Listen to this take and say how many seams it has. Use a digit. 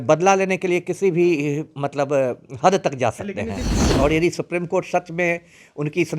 1